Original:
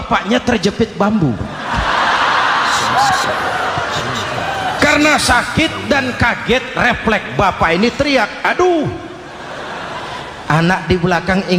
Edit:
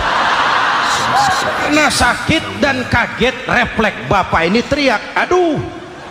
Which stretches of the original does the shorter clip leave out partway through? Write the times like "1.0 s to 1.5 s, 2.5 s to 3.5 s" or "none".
3.5 s to 5.0 s